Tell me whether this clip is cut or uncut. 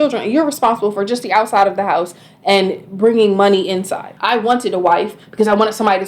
cut